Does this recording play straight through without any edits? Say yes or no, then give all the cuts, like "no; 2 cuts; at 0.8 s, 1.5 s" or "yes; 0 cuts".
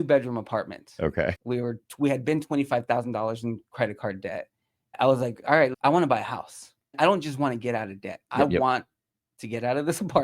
no; 3 cuts; at 1.4 s, 5.8 s, 8.2 s